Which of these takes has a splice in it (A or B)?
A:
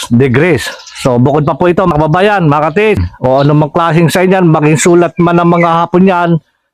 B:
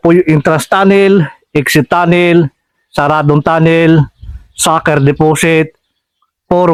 A